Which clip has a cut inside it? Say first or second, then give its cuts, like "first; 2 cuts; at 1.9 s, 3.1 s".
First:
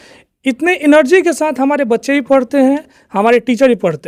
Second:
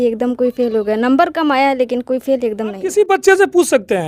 second; 1 cut; at 2.8 s